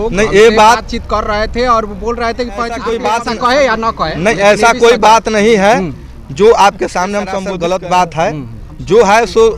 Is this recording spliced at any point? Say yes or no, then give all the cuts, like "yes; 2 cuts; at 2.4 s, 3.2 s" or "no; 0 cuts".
yes; 2 cuts; at 2.8 s, 7.4 s